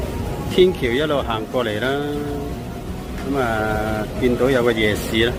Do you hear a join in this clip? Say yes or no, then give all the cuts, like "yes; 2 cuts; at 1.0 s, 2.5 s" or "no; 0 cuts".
no; 0 cuts